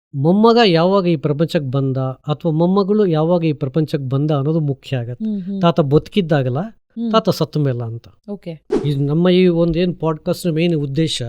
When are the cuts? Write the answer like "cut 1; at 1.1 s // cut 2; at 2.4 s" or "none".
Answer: cut 1; at 8.7 s